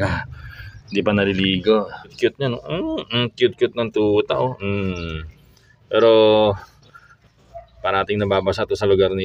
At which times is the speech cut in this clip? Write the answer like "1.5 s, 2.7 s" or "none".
2.1 s